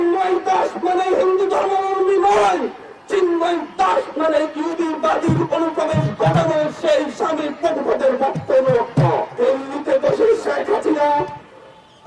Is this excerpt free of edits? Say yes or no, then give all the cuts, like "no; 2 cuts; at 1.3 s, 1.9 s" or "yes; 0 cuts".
no; 1 cut; at 9.3 s